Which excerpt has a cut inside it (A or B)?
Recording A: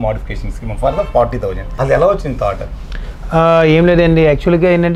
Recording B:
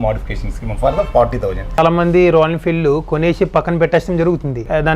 B